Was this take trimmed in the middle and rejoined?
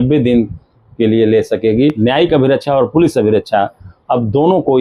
yes; 1 cut; at 2.0 s

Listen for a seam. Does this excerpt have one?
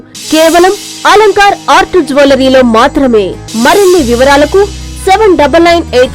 yes; 1 cut; at 3.4 s

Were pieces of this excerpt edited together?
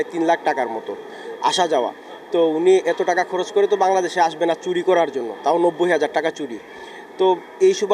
no; 0 cuts

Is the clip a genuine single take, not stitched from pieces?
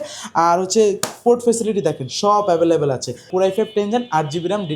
no; 1 cut; at 3.3 s

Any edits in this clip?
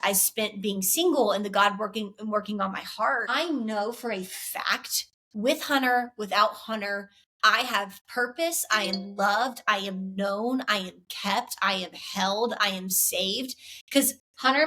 yes; 1 cut; at 3.3 s

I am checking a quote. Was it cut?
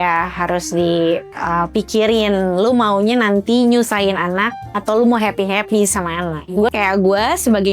yes; 1 cut; at 6.7 s

